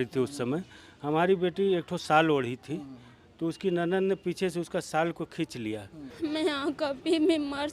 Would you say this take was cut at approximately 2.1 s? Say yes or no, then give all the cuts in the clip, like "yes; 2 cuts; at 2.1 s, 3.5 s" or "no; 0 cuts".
no; 1 cut; at 6.0 s